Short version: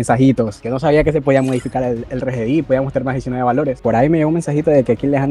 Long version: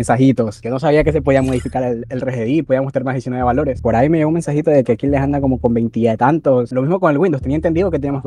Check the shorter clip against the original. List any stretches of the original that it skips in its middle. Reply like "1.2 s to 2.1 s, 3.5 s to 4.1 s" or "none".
none

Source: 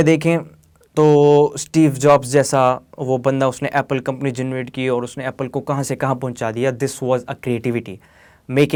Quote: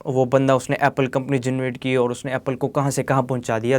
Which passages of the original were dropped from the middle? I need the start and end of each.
none

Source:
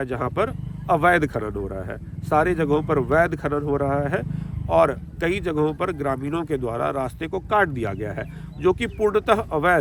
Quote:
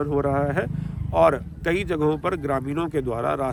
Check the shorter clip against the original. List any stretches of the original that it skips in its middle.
none

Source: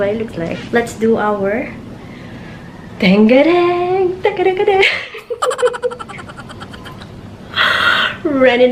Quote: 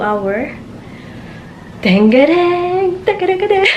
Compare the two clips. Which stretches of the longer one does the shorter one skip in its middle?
none

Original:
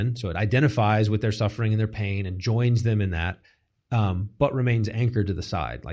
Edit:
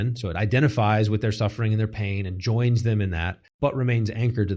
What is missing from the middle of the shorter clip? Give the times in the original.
3.5 s to 4.3 s

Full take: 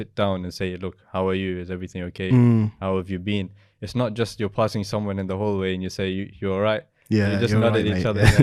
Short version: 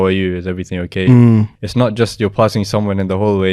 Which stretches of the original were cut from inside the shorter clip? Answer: 2.8 s to 3.7 s

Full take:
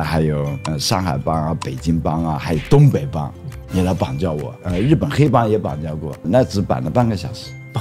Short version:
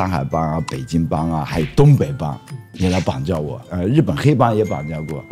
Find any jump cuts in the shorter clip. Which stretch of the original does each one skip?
none

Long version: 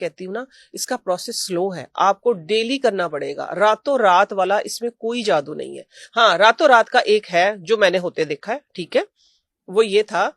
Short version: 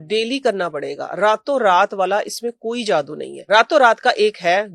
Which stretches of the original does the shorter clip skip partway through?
5.9 s to 6.4 s

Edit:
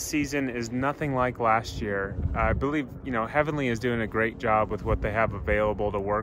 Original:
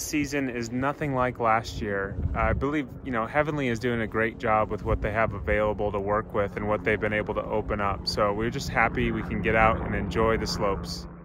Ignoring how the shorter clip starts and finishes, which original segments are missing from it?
none

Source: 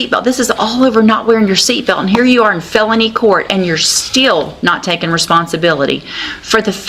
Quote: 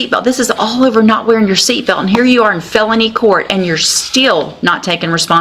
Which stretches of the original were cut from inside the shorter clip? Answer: none

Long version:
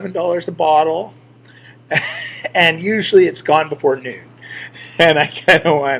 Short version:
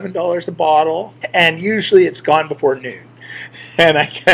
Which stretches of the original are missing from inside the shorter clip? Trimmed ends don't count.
1.2 s to 2.4 s

